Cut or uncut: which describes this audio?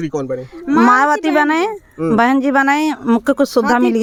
uncut